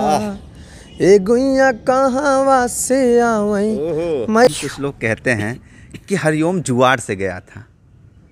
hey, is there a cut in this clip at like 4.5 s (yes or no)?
yes